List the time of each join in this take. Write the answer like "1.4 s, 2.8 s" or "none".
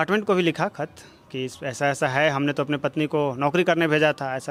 none